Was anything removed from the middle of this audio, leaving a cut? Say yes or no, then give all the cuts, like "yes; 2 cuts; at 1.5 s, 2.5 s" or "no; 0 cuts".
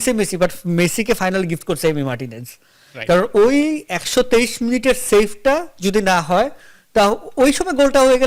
no; 0 cuts